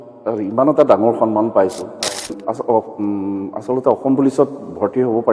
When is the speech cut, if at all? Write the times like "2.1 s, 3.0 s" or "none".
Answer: 2.4 s